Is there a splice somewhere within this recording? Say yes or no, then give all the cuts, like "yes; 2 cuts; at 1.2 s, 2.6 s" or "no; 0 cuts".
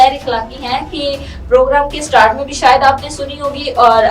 no; 0 cuts